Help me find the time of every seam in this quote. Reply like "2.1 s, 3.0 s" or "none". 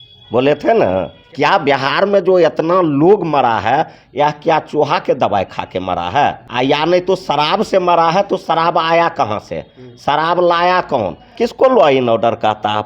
1.2 s, 6.4 s, 11.4 s